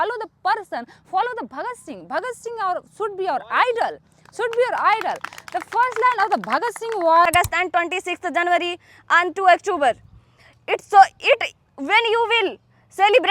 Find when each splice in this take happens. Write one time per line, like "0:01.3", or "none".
0:07.3